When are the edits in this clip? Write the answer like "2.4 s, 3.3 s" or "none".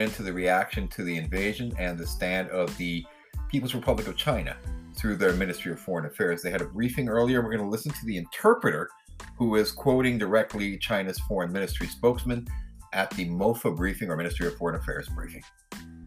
15.0 s